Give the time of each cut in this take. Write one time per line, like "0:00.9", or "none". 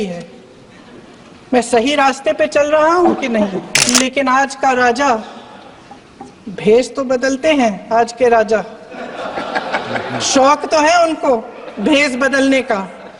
0:03.7